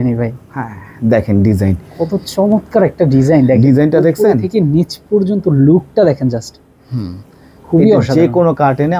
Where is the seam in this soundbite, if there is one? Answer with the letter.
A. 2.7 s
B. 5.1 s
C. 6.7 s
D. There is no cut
D